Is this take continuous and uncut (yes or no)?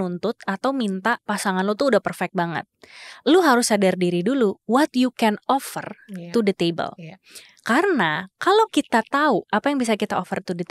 yes